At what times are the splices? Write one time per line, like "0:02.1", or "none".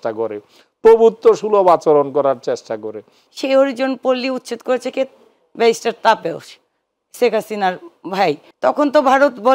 0:03.2
0:08.5